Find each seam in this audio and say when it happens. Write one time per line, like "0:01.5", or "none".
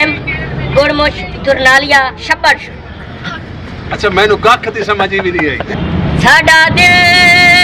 0:05.8